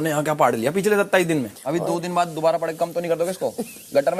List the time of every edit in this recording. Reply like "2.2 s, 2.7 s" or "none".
1.6 s